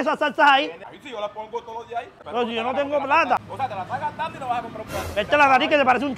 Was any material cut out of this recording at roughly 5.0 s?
no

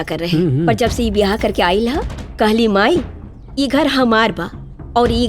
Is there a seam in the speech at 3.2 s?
no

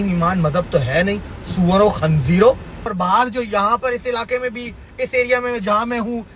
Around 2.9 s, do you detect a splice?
yes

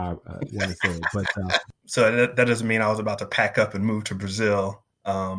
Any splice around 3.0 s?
no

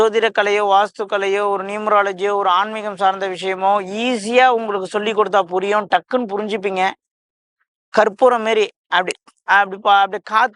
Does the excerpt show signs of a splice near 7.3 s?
no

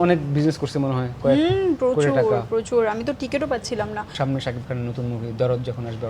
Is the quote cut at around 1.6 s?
no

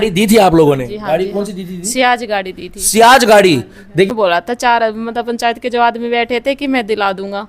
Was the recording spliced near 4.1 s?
yes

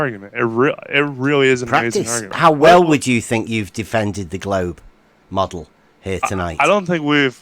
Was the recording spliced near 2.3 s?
yes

